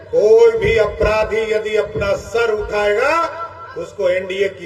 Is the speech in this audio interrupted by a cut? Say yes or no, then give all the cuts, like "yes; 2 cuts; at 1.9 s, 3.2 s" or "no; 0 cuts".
no; 0 cuts